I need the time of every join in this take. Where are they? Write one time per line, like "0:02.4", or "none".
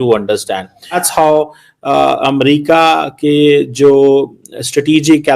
0:01.0

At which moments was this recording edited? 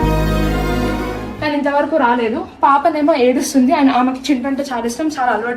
0:01.3

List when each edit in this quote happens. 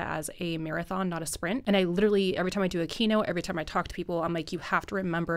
0:01.6

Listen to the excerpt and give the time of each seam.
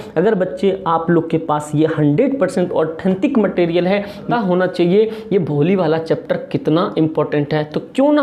0:04.3

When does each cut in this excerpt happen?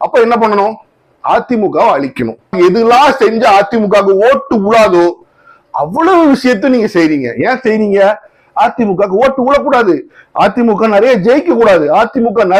0:02.4

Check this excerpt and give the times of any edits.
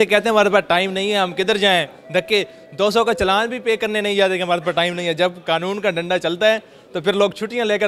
none

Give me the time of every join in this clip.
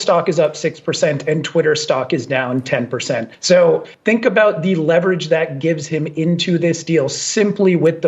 none

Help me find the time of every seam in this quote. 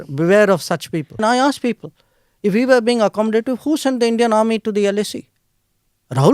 0:01.2

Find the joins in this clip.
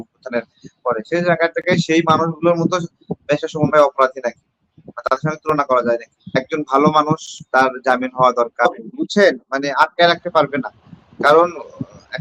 0:06.4
0:08.7

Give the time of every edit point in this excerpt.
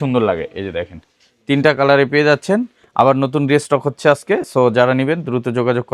none

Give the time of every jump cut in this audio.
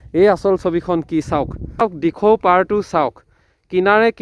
0:01.8

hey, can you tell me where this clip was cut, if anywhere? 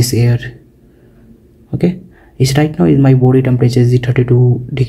none

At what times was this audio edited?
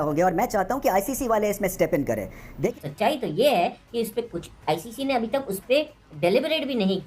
0:02.7

